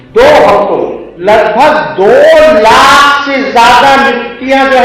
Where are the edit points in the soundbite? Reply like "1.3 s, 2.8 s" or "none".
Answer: 1.0 s